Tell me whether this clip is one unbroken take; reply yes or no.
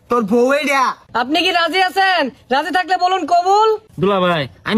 no